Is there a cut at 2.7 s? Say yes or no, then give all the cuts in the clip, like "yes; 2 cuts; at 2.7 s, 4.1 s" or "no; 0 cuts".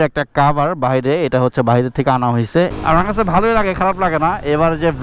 yes; 1 cut; at 2.7 s